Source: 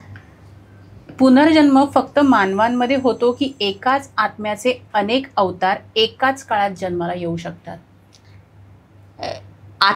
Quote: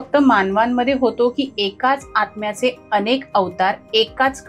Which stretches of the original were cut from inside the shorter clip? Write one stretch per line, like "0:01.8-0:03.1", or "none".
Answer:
none